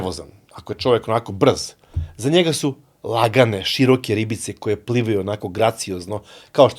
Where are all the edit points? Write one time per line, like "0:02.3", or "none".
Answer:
none